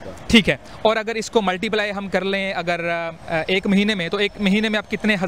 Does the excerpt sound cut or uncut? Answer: uncut